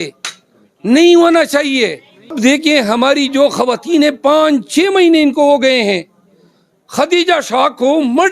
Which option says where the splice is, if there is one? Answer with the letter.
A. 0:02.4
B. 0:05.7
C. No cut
A